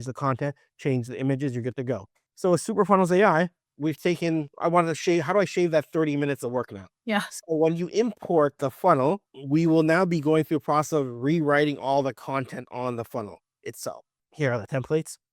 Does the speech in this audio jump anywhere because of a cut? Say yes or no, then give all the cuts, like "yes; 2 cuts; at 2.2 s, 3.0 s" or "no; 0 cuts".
yes; 1 cut; at 14.2 s